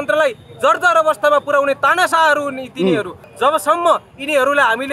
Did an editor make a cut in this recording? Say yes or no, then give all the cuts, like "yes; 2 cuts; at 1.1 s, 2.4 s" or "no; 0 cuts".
yes; 1 cut; at 3.2 s